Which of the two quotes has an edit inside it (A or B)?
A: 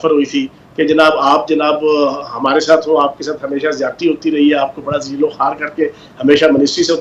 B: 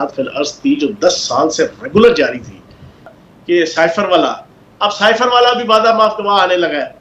B